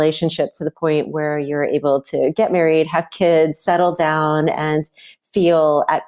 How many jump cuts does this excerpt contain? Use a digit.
0